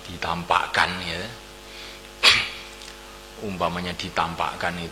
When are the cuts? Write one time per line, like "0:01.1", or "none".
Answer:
none